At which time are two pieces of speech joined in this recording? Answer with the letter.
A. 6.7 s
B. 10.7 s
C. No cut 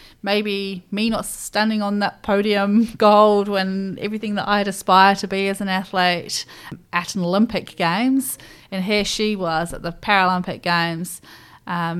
A